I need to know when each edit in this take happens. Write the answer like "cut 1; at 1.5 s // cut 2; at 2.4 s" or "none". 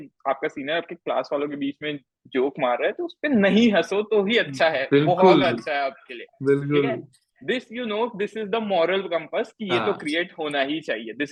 none